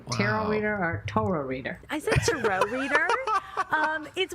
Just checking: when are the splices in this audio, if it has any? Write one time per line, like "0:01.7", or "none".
0:01.8